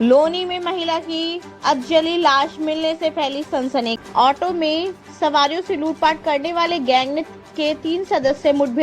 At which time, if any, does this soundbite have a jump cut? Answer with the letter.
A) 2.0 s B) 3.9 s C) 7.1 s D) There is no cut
B